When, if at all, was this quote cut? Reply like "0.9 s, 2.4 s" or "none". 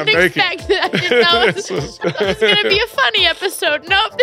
1.9 s